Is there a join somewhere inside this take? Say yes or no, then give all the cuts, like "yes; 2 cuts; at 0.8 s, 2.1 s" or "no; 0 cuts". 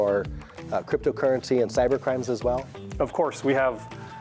no; 0 cuts